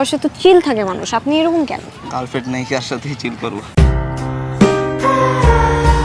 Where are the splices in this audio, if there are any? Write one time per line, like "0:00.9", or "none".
none

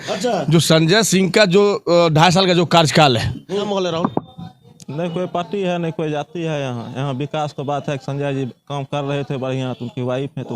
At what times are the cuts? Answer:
0:03.5

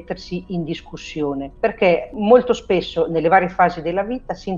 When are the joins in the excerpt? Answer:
0:01.9

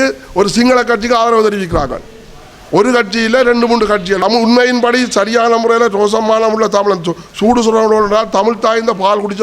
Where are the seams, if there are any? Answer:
0:04.2

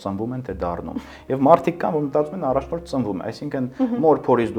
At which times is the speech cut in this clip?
none

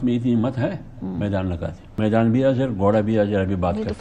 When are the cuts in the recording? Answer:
0:01.8

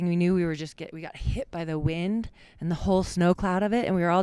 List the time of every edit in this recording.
none

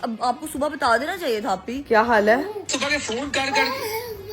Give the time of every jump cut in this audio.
0:01.7
0:02.7

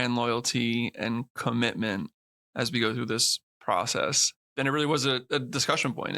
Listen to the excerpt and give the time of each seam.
0:04.3

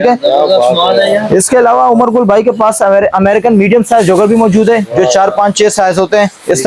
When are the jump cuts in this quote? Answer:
none

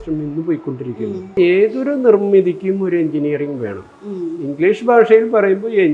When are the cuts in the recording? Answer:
0:01.3

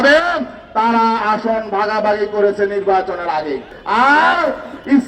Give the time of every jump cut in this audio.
0:03.7

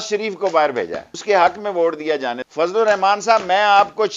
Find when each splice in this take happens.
0:01.1
0:02.4

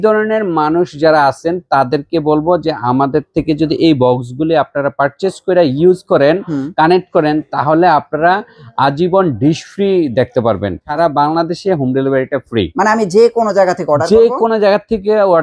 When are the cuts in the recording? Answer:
0:10.8

